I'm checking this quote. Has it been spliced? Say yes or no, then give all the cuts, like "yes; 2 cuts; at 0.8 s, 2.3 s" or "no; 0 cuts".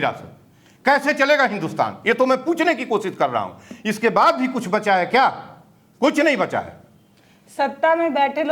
no; 0 cuts